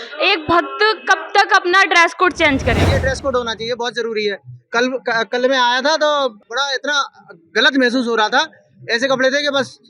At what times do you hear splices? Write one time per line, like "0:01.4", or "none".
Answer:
0:02.9
0:06.4